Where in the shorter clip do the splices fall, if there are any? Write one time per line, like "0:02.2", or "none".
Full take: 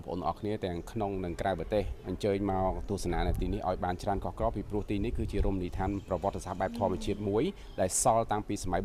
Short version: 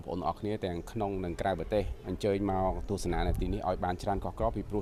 none